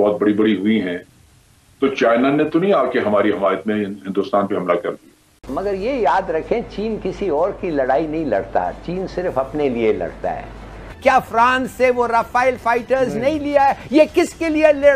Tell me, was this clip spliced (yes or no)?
yes